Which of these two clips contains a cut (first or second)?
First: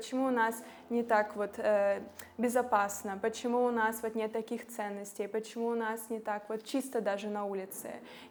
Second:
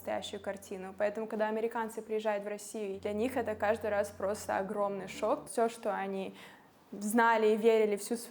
second